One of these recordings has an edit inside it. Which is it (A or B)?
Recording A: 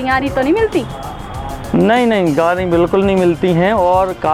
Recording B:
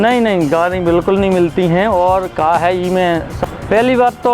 B